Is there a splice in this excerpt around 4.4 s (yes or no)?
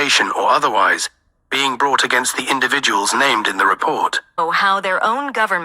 yes